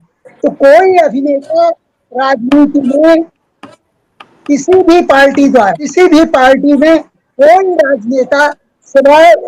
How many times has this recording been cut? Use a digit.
1